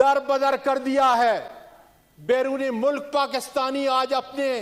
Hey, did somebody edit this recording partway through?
no; 0 cuts

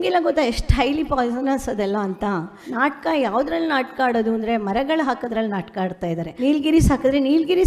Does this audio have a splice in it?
yes; 2 cuts; at 2.6 s, 6.3 s

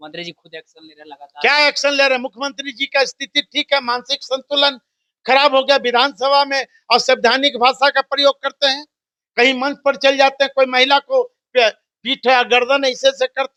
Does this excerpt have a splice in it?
no; 0 cuts

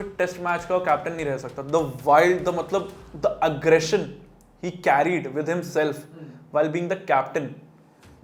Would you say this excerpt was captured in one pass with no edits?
yes; 0 cuts

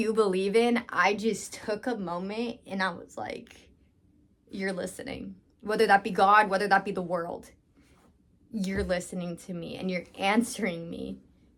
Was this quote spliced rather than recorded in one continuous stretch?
no; 0 cuts

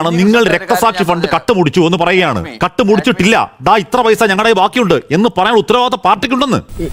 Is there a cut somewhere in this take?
no; 0 cuts

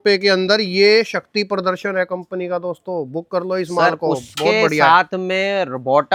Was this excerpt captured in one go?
yes; 0 cuts

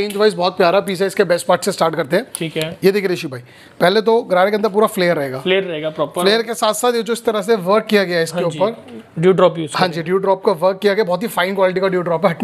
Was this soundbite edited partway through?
no; 0 cuts

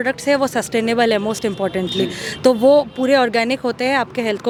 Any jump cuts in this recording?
no; 0 cuts

